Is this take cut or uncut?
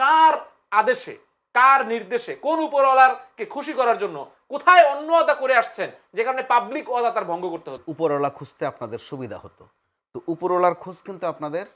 cut